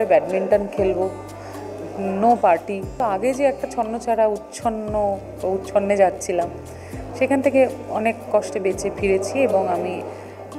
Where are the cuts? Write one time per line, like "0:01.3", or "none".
0:03.0